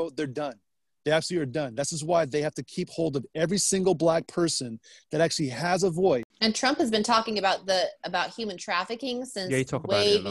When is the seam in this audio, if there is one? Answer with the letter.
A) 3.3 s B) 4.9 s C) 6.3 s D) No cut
C